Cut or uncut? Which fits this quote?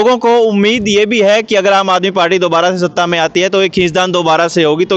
uncut